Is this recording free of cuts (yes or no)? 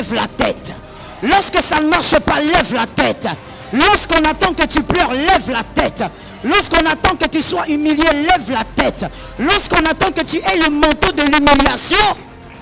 yes